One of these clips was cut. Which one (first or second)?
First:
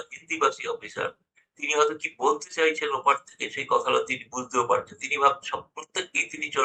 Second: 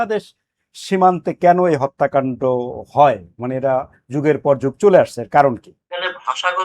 second